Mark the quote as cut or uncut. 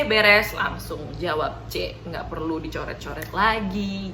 uncut